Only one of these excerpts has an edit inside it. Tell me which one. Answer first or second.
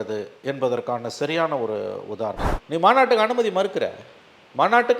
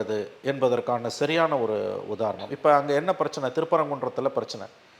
first